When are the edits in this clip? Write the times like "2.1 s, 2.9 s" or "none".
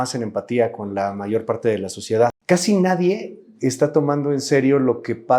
2.4 s